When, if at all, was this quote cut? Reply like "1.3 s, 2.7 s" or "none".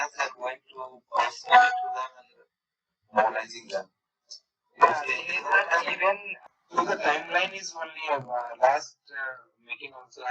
6.3 s